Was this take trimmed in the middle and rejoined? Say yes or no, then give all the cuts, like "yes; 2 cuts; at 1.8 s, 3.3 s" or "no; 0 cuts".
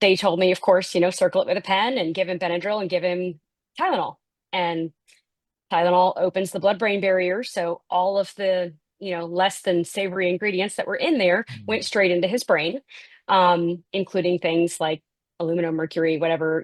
no; 0 cuts